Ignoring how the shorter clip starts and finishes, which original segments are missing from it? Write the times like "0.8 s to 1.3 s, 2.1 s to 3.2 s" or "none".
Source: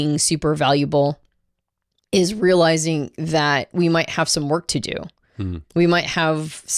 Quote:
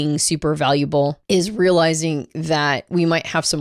1.2 s to 2.0 s